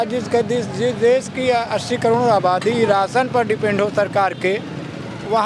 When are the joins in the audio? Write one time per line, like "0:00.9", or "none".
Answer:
none